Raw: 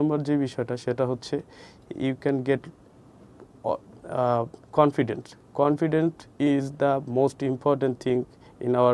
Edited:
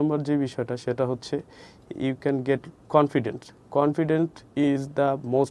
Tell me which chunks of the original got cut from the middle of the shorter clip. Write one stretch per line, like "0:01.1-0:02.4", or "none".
0:02.8-0:04.6